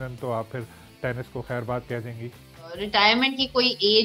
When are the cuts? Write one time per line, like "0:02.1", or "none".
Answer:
0:02.8